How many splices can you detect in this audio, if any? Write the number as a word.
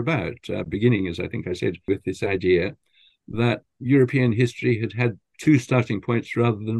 three